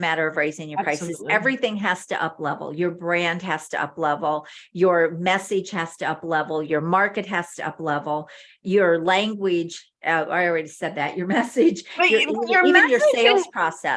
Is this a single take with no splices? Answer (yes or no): yes